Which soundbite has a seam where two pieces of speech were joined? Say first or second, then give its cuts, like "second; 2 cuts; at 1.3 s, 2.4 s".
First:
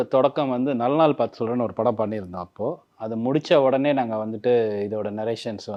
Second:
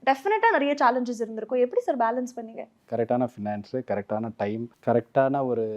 second; 2 cuts; at 2.8 s, 4.7 s